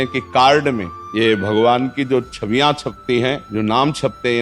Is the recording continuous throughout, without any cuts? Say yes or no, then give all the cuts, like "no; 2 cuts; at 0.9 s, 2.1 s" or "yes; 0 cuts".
no; 2 cuts; at 1.0 s, 3.4 s